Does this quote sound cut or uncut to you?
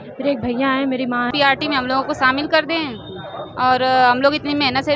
cut